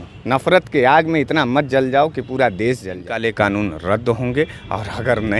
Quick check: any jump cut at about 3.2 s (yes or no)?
yes